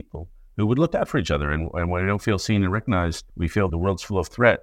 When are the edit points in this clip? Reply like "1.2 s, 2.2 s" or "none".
3.6 s